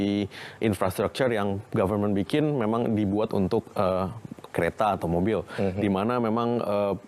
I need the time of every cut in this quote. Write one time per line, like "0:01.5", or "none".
none

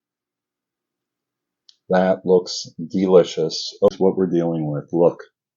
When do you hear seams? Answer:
0:03.9

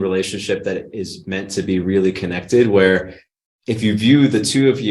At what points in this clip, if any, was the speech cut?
none

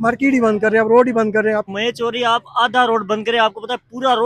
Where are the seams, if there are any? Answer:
0:01.7

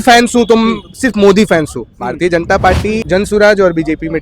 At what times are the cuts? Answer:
0:03.0

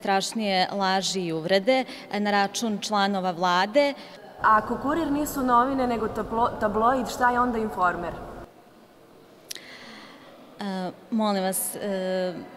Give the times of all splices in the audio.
0:03.5

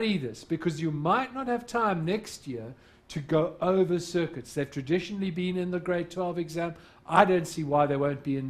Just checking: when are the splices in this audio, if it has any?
0:03.5

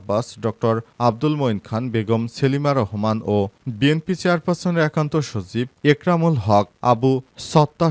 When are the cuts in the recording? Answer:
none

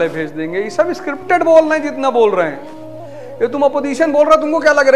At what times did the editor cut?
none

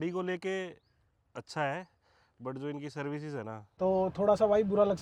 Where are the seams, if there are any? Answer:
0:03.7

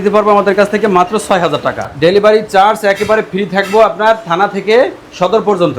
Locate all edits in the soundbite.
0:01.9

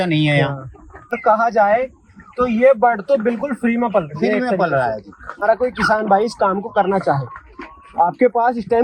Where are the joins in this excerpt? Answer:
0:01.2
0:05.4

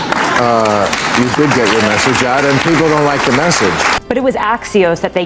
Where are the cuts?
0:03.9

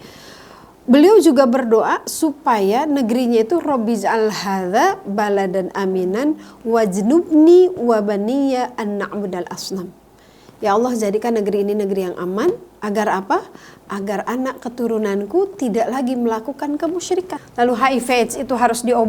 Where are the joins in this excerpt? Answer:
0:17.4

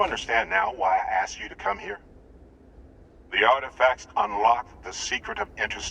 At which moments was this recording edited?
0:01.4

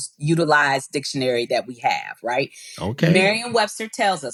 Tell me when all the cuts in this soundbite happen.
none

